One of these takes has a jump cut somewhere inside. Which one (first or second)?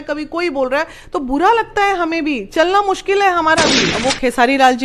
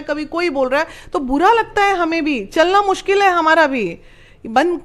first